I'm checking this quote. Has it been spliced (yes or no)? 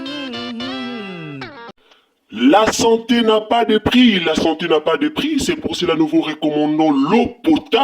yes